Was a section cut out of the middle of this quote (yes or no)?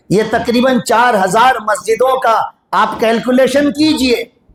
no